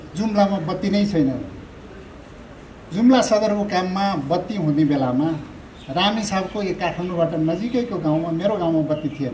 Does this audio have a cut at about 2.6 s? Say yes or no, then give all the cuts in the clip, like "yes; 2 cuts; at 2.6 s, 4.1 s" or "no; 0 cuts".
no; 0 cuts